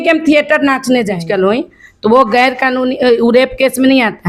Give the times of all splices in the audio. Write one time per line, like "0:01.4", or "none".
0:01.2